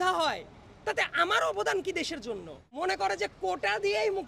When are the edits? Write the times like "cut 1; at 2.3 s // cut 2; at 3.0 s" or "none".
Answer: cut 1; at 2.6 s